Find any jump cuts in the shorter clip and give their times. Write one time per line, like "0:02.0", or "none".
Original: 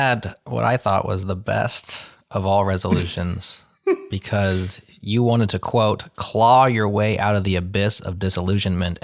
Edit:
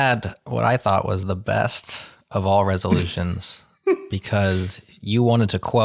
none